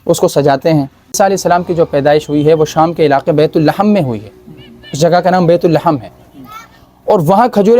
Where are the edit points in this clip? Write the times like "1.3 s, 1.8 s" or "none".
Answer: 1.2 s

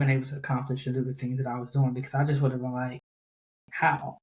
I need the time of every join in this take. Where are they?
none

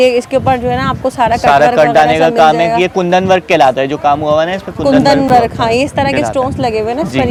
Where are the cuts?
none

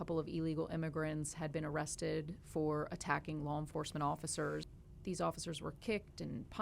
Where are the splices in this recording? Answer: 4.7 s

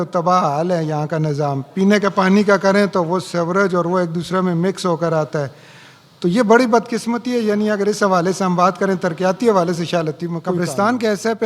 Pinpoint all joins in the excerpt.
10.6 s

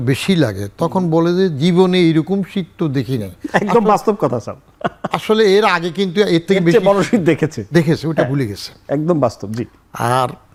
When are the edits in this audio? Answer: none

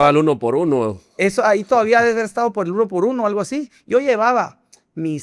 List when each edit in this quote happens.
none

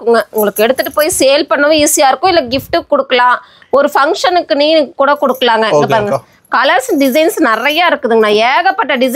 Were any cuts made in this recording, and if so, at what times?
none

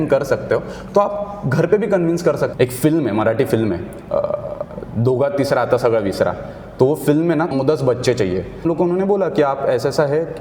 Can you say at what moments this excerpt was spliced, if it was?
2.5 s, 7.5 s, 8.6 s

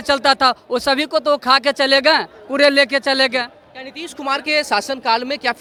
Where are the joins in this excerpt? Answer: none

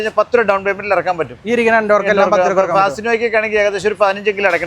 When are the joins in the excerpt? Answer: none

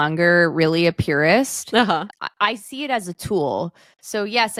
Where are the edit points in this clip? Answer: none

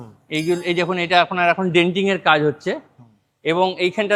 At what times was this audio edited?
none

